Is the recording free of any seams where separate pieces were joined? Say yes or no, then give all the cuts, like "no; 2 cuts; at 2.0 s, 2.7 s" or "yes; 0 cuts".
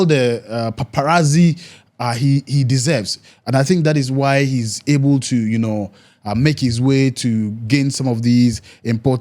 yes; 0 cuts